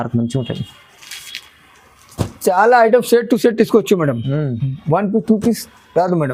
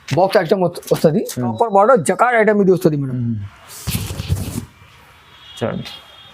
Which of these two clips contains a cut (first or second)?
second